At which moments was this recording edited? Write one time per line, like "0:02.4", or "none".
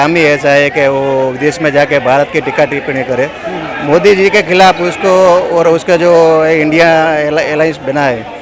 none